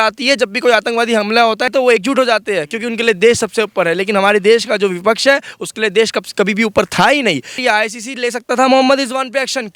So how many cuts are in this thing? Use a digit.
2